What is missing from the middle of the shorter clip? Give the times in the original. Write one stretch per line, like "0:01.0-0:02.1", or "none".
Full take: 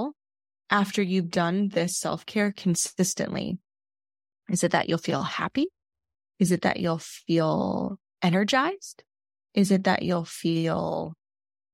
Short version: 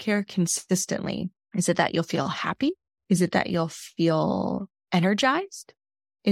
0:03.7-0:04.3
0:05.9-0:06.2